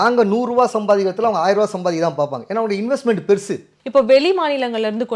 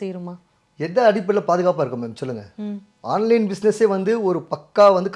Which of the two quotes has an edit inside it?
first; 1 cut; at 3.7 s

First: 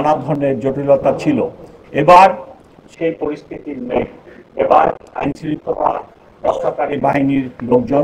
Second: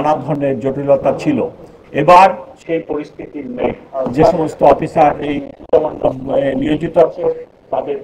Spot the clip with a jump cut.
second; 2 cuts; at 2.5 s, 3.9 s

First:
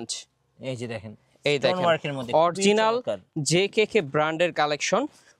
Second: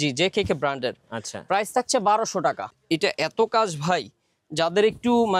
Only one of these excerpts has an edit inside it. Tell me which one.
second; 1 cut; at 2.7 s

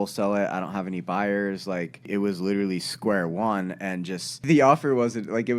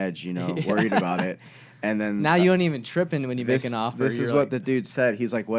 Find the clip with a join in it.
first; 2 cuts; at 2.1 s, 4.4 s

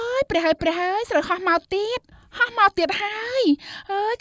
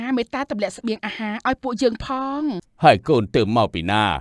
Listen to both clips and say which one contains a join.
second; 1 cut; at 2.7 s

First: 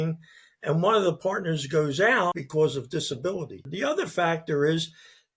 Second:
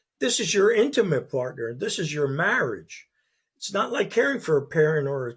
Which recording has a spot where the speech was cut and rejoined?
first; 2 cuts; at 2.4 s, 3.6 s

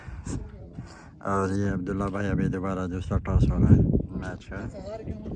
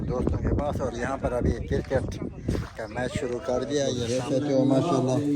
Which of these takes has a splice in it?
second; 1 cut; at 4.0 s

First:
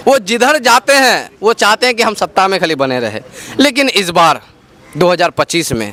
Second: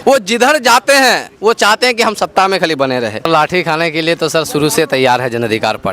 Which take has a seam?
second; 1 cut; at 3.3 s

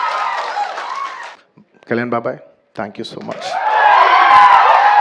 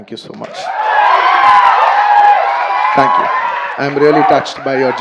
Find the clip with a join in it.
first; 1 cut; at 1.2 s

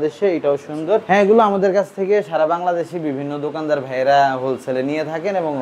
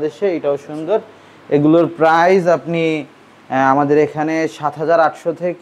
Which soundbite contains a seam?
first; 1 cut; at 1.0 s

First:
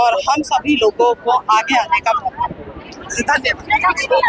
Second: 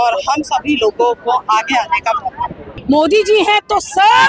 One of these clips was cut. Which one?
second; 1 cut; at 2.8 s

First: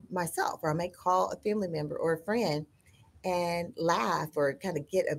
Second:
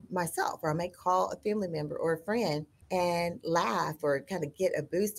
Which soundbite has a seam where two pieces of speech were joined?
second; 1 cut; at 2.7 s

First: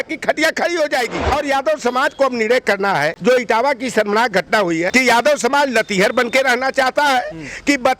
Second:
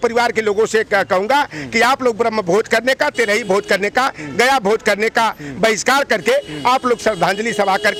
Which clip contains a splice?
first; 3 cuts; at 1.2 s, 3.1 s, 4.9 s

